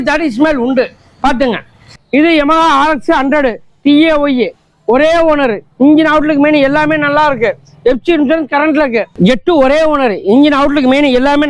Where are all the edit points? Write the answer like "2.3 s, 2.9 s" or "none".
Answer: 1.9 s, 9.1 s